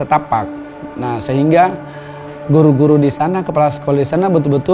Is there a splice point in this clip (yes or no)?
no